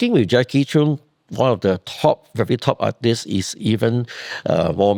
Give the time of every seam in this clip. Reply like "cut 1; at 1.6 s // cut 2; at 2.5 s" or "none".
none